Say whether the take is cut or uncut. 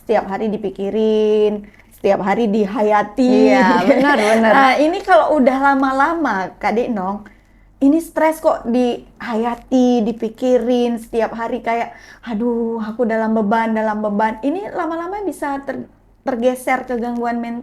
uncut